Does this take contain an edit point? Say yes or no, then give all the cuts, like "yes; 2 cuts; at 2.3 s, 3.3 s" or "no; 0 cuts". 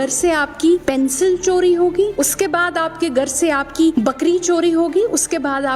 yes; 3 cuts; at 0.8 s, 2.1 s, 3.9 s